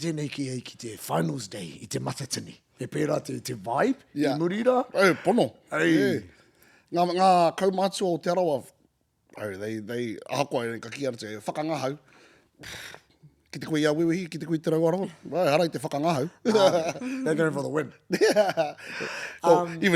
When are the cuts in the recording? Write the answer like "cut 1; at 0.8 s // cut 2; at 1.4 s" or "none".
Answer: none